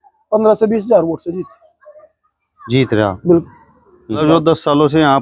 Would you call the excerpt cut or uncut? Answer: cut